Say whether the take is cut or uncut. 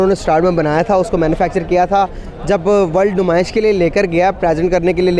uncut